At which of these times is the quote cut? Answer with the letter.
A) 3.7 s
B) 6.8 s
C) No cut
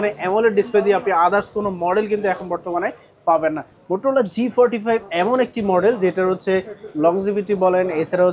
A